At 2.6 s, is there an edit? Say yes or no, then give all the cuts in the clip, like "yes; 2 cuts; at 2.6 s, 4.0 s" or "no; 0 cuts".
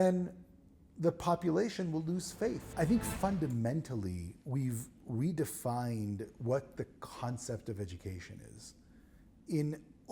yes; 1 cut; at 2.6 s